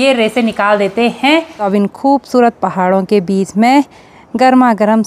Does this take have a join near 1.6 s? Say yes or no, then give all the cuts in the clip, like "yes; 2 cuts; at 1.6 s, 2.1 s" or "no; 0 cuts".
yes; 1 cut; at 1.6 s